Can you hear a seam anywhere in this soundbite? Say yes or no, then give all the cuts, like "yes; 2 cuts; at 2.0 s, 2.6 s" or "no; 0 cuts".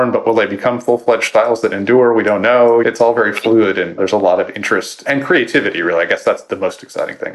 yes; 4 cuts; at 2.8 s, 4.0 s, 5.0 s, 6.4 s